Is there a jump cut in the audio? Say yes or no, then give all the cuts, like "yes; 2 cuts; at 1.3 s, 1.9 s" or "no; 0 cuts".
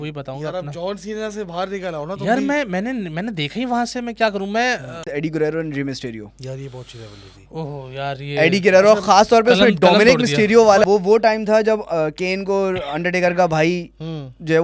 yes; 2 cuts; at 5.1 s, 10.8 s